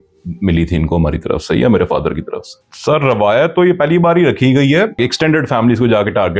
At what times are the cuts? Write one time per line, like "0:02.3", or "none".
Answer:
0:02.7
0:05.0